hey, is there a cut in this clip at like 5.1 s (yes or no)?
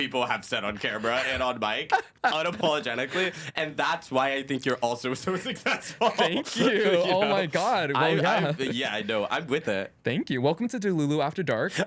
no